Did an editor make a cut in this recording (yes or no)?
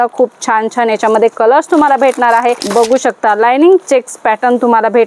yes